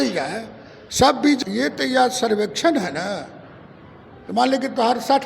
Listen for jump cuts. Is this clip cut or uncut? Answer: cut